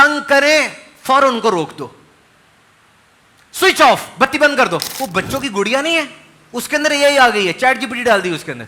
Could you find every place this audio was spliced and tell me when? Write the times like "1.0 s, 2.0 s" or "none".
4.9 s